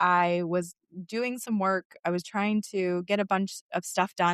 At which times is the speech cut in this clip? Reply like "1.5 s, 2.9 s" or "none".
none

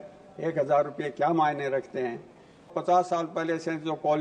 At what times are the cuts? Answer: 2.7 s

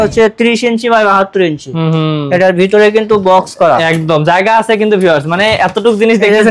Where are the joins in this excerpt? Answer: none

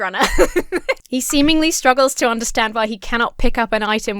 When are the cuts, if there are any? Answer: 1.0 s

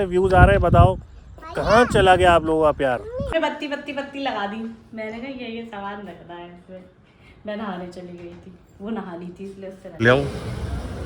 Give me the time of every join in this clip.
3.3 s, 10.0 s

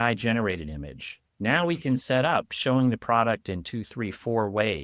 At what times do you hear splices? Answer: none

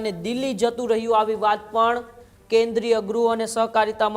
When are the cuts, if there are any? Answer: none

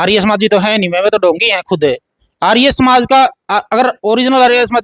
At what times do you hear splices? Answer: none

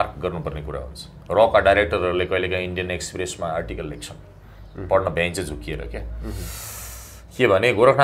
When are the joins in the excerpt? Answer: none

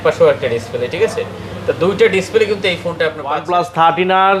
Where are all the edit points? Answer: 3.3 s

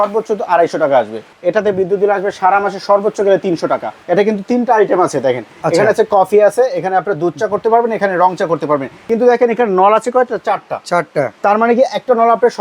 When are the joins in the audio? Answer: 1.3 s, 4.0 s, 9.0 s

